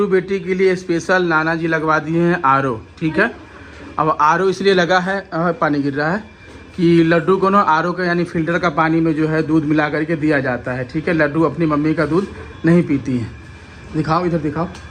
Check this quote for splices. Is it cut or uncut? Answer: uncut